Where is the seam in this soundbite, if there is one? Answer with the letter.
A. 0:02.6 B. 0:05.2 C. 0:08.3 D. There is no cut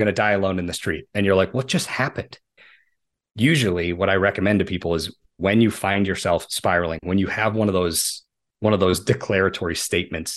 A